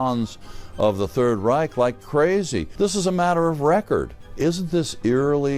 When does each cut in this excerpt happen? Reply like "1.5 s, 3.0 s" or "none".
2.7 s, 4.2 s